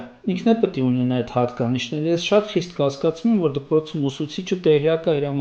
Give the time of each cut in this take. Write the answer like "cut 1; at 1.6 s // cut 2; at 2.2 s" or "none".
none